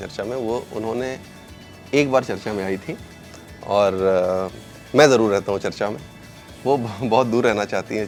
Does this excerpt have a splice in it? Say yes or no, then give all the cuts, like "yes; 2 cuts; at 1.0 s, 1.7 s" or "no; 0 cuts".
no; 0 cuts